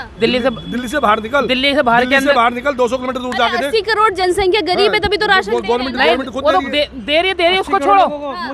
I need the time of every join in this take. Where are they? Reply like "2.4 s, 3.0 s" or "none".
none